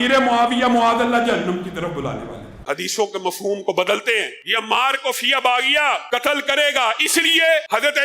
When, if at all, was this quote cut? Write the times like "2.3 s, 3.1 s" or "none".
2.7 s